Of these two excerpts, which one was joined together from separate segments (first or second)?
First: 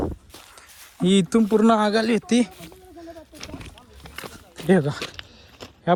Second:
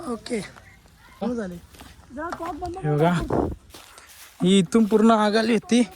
second